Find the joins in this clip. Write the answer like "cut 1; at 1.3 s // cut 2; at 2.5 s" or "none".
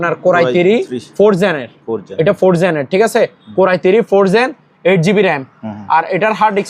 none